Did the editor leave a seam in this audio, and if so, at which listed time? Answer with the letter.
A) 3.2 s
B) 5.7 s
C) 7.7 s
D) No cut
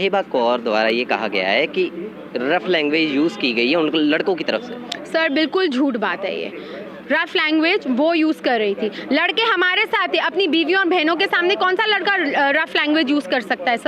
D